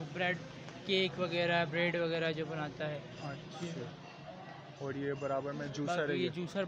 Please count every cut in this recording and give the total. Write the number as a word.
zero